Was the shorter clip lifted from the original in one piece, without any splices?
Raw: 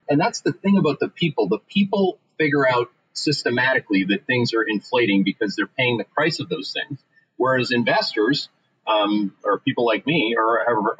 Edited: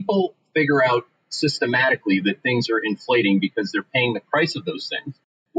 yes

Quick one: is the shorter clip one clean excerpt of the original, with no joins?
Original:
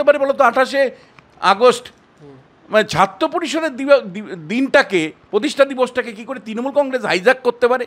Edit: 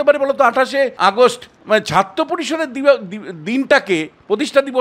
no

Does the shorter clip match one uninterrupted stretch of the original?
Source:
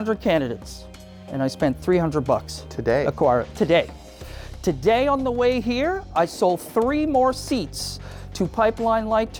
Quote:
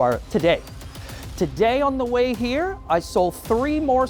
yes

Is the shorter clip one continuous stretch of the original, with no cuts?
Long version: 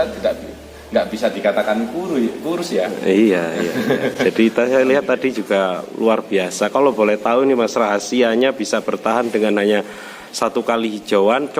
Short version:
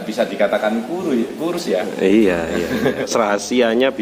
no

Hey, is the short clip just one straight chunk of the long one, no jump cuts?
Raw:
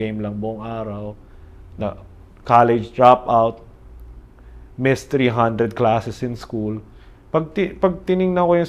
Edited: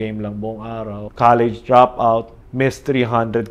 no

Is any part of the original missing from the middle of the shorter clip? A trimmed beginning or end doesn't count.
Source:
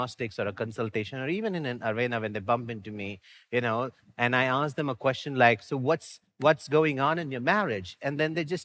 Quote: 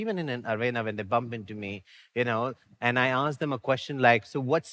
no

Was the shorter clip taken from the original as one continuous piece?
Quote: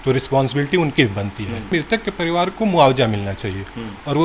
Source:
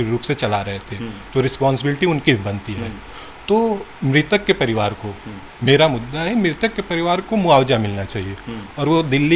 no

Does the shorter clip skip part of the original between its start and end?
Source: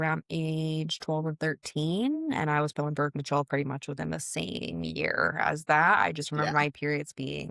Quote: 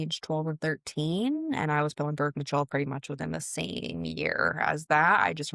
no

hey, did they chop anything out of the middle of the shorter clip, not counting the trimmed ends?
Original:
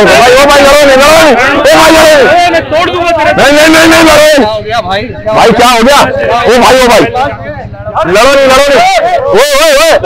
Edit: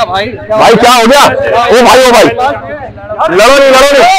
no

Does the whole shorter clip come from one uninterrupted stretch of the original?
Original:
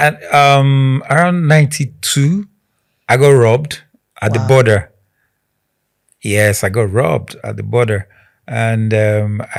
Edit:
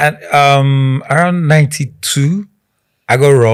yes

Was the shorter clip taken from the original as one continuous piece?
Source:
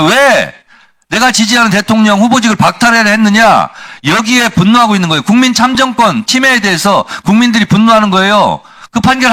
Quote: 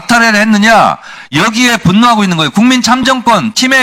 yes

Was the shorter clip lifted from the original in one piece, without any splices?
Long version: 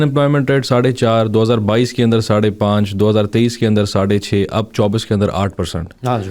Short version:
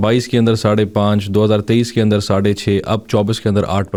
yes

